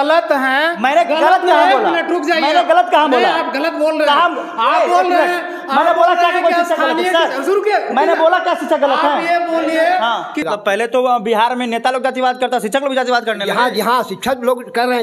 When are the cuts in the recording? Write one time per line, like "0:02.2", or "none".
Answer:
0:10.5